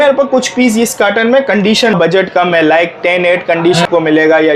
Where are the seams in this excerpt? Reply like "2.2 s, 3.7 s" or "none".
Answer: 1.9 s, 3.9 s